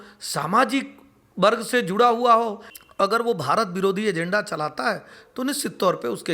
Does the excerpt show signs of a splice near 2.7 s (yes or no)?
yes